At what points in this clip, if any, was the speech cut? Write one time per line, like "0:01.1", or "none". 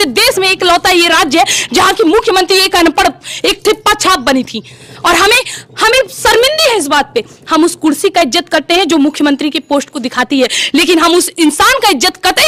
none